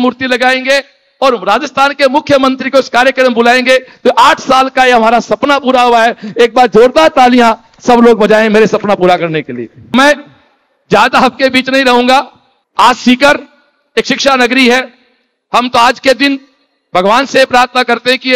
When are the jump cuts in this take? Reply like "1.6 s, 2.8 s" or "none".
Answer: none